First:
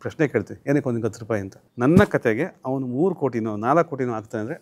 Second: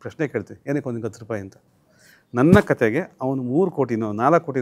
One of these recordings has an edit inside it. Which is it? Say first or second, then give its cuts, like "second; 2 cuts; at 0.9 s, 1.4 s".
first; 1 cut; at 1.6 s